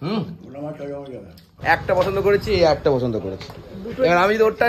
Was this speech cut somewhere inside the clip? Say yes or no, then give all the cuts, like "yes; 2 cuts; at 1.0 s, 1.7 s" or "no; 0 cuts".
yes; 1 cut; at 1.5 s